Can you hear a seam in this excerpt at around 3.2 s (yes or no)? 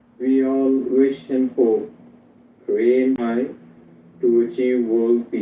yes